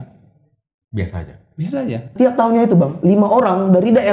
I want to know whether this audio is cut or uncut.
cut